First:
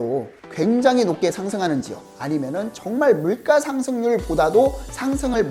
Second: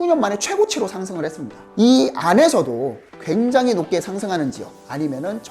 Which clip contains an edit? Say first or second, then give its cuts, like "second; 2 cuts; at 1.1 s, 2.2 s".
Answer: second; 1 cut; at 1.7 s